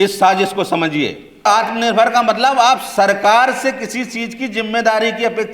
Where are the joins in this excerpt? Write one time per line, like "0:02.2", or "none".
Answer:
0:01.5